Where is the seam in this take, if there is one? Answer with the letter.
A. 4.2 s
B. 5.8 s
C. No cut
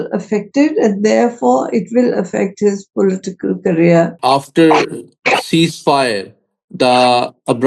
A